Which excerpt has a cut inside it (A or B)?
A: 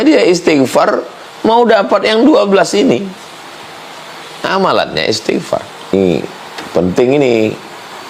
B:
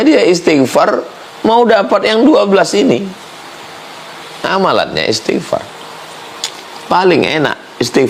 A